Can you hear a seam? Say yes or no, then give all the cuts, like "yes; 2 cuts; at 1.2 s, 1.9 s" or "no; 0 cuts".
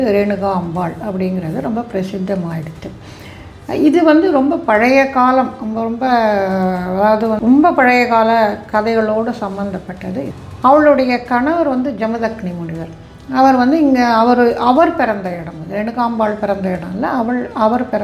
yes; 2 cuts; at 7.4 s, 10.4 s